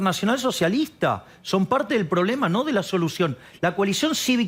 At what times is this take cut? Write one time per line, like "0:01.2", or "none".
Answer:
none